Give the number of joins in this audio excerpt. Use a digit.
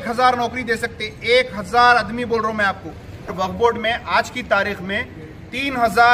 1